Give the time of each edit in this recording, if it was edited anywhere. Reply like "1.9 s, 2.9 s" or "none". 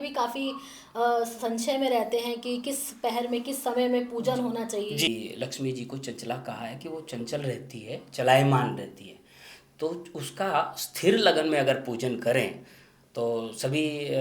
5.1 s